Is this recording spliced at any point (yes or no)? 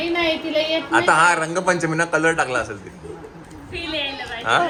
no